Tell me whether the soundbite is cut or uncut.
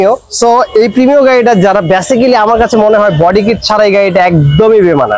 uncut